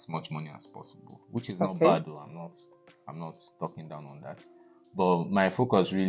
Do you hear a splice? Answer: no; 0 cuts

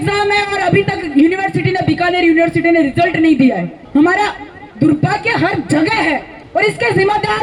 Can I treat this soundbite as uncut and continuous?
no; 2 cuts; at 3.7 s, 6.3 s

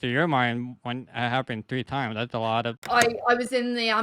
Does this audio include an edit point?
yes; 1 cut; at 2.8 s

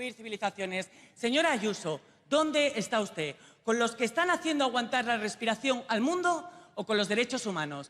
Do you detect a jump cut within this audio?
no; 0 cuts

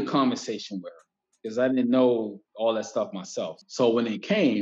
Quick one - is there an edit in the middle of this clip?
yes; 2 cuts; at 2.4 s, 3.6 s

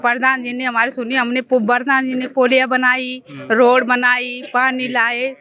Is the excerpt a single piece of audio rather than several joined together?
yes; 0 cuts

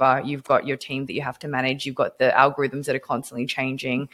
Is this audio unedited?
yes; 0 cuts

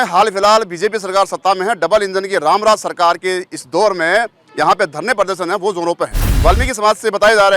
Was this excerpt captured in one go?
no; 1 cut; at 6.3 s

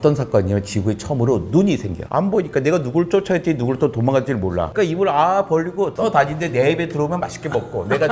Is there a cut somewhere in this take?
yes; 3 cuts; at 2.0 s, 4.7 s, 5.9 s

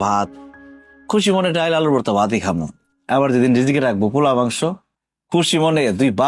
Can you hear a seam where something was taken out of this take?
no; 0 cuts

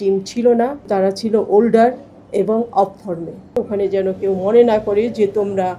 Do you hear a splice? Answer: yes; 2 cuts; at 0.9 s, 3.6 s

